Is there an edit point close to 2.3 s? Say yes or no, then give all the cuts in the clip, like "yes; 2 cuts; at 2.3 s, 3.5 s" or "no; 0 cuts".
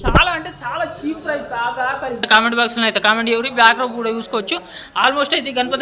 yes; 1 cut; at 2.3 s